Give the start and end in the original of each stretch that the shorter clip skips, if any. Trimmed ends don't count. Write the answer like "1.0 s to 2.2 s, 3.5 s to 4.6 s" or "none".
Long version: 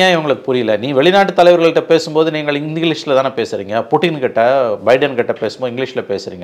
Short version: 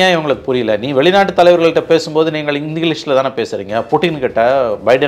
none

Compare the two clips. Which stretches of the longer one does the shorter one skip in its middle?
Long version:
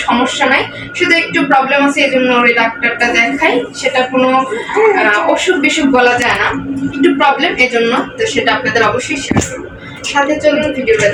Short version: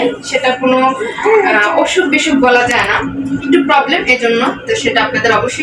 none

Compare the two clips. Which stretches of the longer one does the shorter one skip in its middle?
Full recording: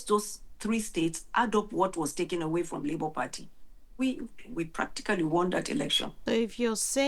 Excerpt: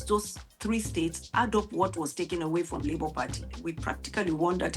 3.5 s to 4.4 s

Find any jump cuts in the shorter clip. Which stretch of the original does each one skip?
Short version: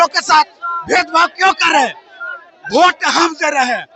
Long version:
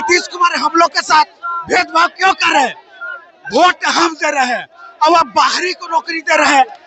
none

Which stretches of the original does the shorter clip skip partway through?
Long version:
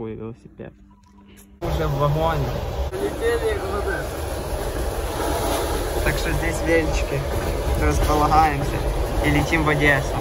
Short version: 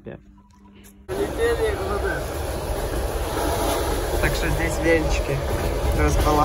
1.5 s to 2.8 s

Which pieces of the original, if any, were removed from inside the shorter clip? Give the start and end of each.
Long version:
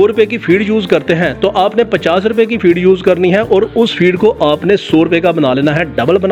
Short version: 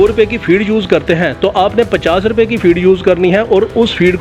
none

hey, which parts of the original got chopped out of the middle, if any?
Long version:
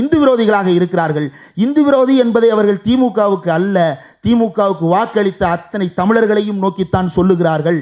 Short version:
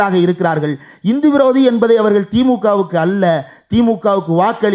none

